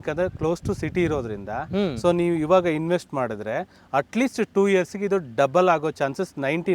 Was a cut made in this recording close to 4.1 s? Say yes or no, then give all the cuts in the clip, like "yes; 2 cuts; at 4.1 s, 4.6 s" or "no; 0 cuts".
no; 0 cuts